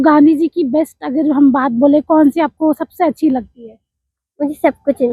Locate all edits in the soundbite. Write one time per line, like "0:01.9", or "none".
none